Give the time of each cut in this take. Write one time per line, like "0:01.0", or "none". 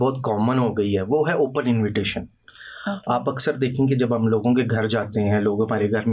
none